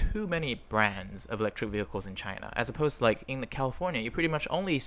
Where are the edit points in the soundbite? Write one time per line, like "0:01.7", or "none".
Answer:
none